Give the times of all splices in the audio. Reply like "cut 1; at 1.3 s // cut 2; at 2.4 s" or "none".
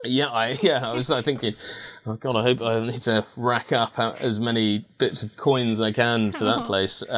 none

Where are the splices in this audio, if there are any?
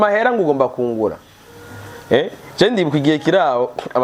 none

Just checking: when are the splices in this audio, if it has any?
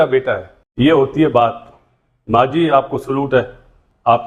none

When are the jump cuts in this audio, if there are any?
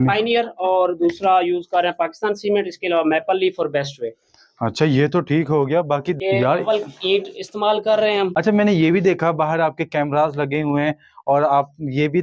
cut 1; at 6.2 s // cut 2; at 8.3 s

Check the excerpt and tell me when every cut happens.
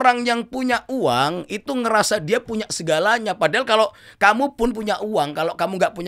none

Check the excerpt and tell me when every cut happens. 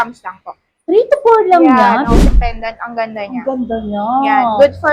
cut 1; at 2.3 s

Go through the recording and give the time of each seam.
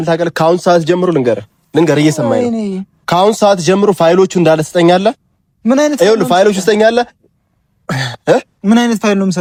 none

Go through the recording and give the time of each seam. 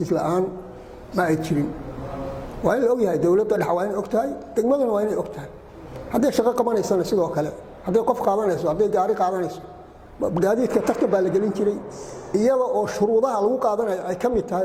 none

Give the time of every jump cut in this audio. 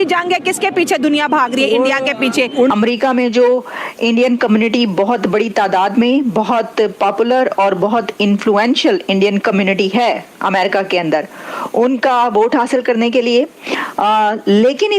cut 1; at 2.7 s

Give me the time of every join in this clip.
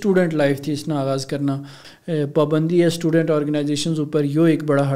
cut 1; at 1.8 s

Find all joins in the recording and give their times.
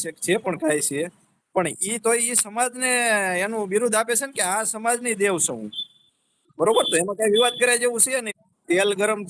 cut 1; at 8.3 s

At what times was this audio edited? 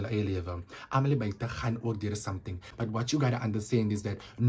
cut 1; at 2.6 s

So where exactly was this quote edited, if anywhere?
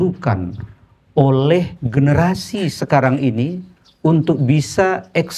cut 1; at 2.0 s

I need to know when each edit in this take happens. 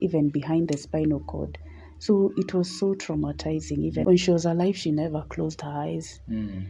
cut 1; at 4.0 s

